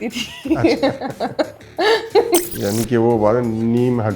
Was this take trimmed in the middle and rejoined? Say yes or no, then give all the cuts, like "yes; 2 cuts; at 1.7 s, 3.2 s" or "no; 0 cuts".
yes; 1 cut; at 2.5 s